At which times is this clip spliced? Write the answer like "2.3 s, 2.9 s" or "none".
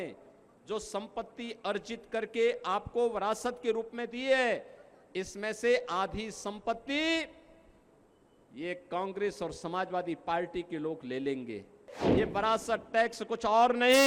12.0 s